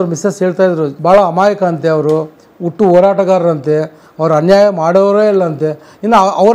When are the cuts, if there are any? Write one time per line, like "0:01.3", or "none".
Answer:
0:00.9